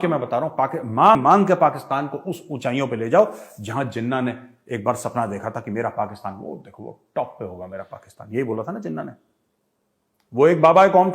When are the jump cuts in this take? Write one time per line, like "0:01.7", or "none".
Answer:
0:01.2